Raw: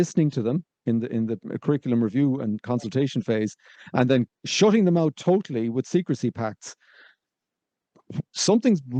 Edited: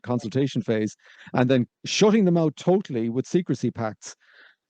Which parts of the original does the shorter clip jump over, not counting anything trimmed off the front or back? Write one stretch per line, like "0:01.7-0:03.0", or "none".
none